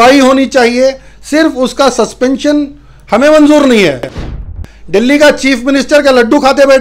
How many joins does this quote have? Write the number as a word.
one